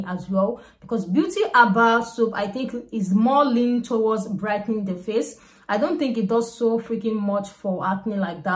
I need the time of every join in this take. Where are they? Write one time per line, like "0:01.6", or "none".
none

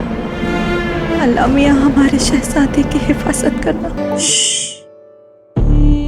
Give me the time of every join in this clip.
0:04.0

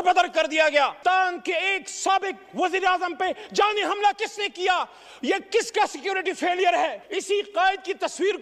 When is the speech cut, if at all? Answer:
0:01.0
0:07.0

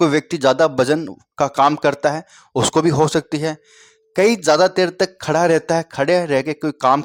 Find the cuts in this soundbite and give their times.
none

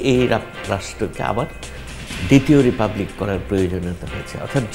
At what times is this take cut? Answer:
none

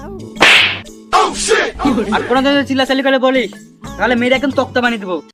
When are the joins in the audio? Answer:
none

